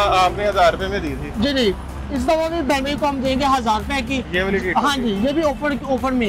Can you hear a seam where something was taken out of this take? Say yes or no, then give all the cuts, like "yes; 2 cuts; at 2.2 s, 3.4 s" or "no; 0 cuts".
no; 0 cuts